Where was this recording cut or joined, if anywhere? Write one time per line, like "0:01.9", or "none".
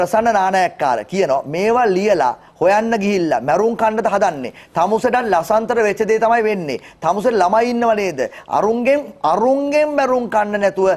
none